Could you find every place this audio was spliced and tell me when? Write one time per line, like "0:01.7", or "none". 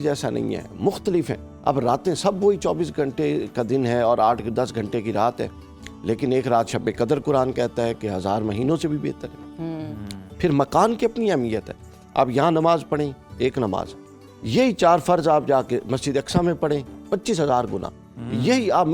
none